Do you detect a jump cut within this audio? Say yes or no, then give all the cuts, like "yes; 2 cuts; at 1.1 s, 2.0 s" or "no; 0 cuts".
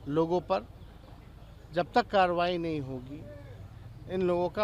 no; 0 cuts